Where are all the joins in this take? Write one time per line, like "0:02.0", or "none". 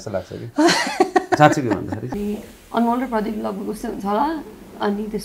0:02.1